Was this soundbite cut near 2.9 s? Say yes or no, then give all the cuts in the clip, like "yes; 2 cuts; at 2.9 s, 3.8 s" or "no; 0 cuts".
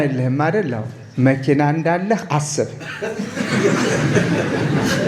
no; 0 cuts